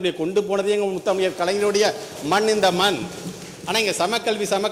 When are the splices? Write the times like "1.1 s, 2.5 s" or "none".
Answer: none